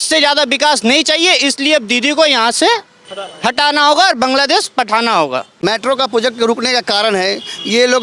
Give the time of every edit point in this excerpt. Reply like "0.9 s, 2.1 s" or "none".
5.5 s